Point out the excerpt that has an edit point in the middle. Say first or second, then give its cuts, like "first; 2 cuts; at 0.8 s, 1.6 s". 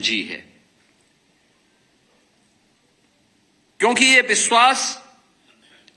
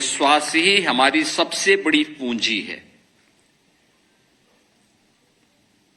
second; 1 cut; at 1.0 s